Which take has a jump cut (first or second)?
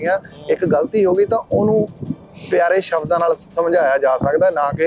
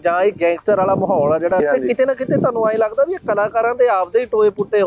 second